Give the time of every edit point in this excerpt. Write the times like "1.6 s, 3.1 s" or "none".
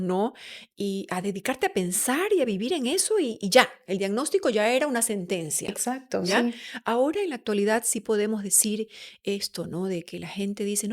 none